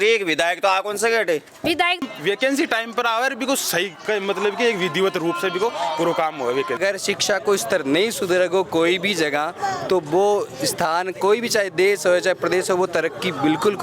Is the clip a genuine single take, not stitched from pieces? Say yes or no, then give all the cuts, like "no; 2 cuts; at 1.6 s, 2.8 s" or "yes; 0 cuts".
no; 2 cuts; at 2.0 s, 6.8 s